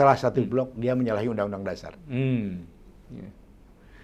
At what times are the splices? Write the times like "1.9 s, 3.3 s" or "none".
none